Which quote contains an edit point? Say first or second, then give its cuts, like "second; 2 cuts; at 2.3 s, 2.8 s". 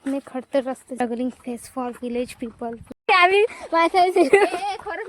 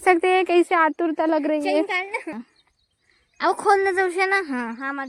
first; 1 cut; at 1.0 s